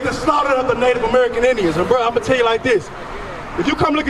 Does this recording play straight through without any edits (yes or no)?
yes